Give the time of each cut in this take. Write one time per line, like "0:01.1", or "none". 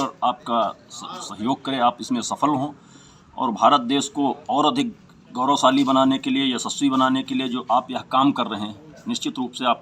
none